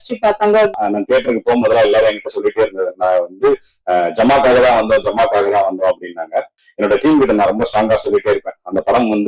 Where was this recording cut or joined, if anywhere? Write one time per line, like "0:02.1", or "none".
0:00.7
0:06.6